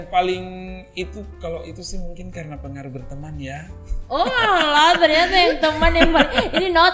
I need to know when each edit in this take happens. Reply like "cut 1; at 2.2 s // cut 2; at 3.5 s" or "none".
none